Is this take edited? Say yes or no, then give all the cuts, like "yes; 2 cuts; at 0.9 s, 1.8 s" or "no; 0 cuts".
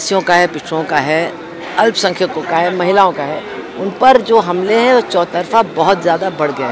no; 0 cuts